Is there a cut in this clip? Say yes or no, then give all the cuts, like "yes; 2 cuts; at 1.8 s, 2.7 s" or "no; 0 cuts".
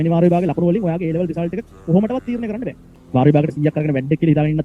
yes; 1 cut; at 2.8 s